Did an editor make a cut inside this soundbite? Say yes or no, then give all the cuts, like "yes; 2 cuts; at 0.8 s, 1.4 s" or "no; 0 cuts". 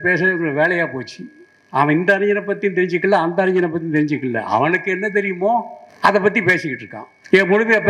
no; 0 cuts